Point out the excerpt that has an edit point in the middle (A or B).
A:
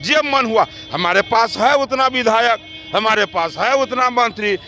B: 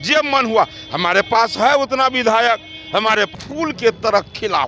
B